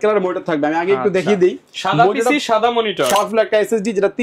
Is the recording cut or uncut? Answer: cut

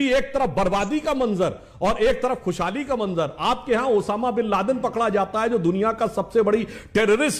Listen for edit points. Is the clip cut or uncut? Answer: uncut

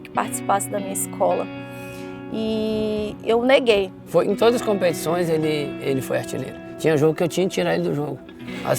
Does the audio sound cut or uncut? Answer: cut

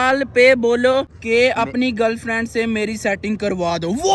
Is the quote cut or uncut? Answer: uncut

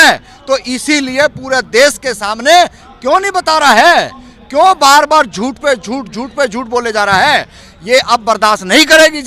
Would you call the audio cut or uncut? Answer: uncut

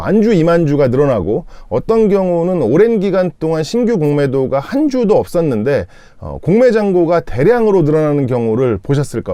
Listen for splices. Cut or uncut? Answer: uncut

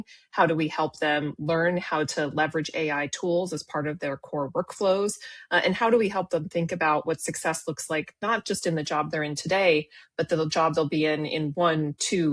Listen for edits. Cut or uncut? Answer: uncut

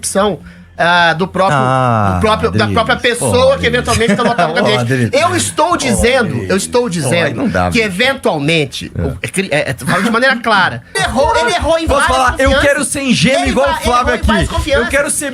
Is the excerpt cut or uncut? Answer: cut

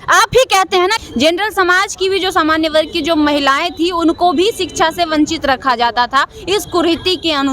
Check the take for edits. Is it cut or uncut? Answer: cut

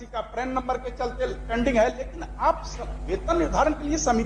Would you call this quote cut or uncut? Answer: uncut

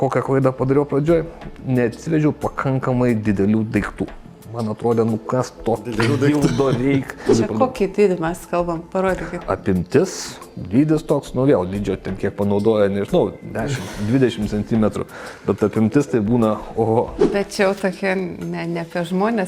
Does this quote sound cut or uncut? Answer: cut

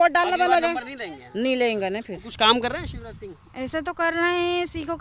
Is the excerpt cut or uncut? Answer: cut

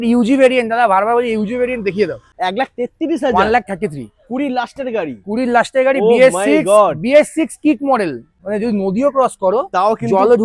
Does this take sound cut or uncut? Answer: cut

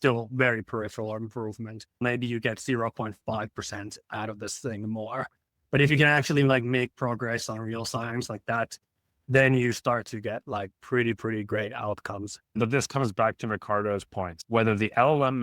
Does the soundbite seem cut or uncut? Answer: cut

